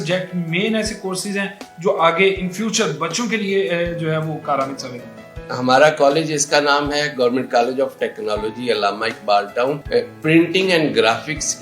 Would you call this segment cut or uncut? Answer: cut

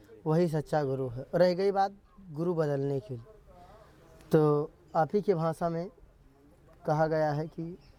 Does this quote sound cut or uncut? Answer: uncut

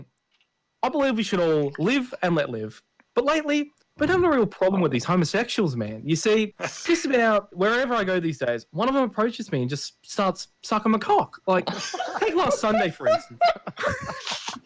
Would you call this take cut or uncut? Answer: cut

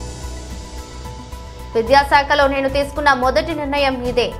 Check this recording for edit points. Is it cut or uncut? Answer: cut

